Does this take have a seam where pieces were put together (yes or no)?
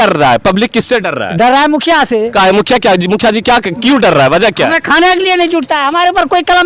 no